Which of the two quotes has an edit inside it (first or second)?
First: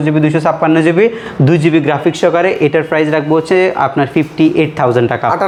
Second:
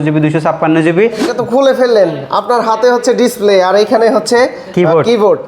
second